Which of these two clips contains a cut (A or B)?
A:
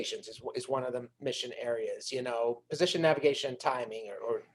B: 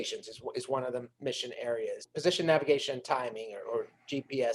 B